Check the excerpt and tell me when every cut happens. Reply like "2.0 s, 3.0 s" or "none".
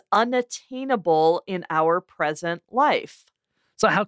none